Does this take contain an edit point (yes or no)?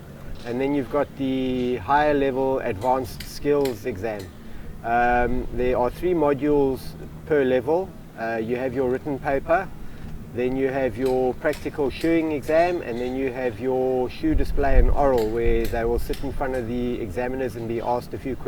no